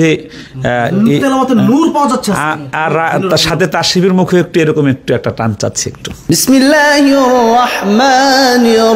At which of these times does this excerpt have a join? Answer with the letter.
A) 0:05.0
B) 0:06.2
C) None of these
C